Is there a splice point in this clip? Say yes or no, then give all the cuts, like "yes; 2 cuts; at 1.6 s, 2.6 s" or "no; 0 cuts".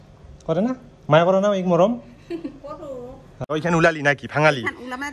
yes; 1 cut; at 3.4 s